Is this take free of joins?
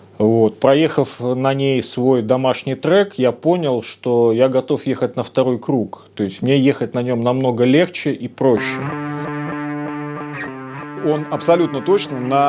no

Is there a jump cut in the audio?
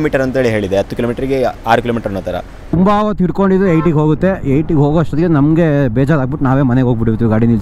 yes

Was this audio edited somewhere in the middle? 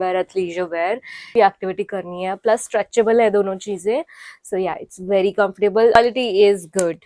yes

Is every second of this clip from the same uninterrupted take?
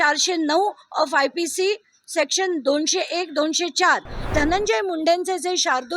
no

